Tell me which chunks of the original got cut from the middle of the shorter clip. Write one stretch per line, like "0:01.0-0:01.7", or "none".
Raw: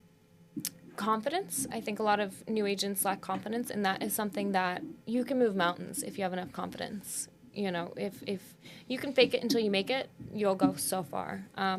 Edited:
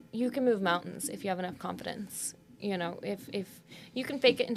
none